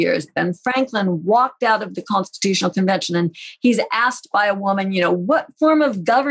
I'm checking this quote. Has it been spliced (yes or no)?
no